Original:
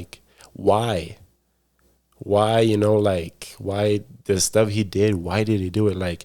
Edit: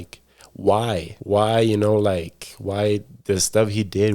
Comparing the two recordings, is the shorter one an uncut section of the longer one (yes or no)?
no